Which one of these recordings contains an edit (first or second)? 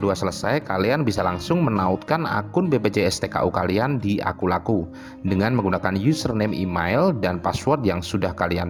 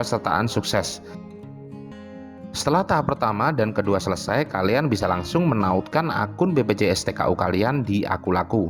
second